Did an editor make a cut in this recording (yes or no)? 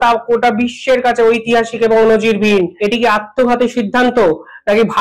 yes